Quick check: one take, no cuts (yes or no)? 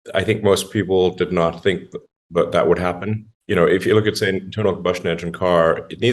no